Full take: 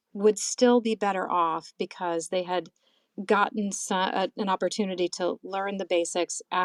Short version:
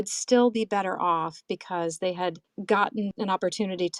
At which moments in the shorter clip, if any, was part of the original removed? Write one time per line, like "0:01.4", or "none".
0:02.5
0:03.2